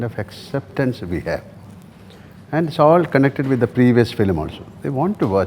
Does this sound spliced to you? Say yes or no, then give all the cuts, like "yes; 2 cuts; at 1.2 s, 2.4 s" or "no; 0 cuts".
no; 0 cuts